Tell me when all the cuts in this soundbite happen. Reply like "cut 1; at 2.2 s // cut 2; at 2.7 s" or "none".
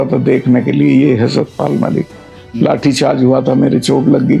none